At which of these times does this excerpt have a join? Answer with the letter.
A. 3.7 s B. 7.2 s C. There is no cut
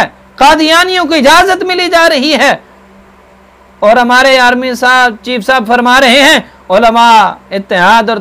C